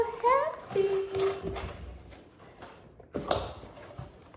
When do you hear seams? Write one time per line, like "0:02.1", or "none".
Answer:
none